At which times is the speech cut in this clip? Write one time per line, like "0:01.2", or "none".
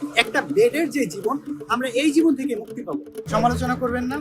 0:03.2